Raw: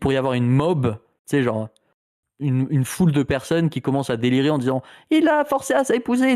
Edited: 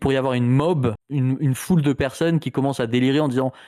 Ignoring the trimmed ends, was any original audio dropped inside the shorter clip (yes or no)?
yes